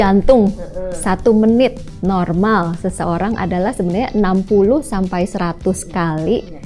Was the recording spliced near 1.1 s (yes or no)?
no